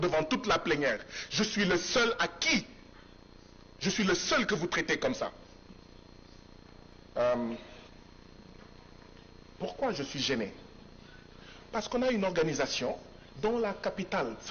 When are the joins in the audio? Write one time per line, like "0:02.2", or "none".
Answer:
none